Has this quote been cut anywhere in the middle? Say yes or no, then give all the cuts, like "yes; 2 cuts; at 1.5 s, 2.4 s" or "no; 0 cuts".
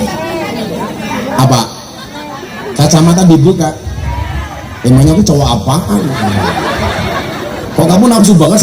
no; 0 cuts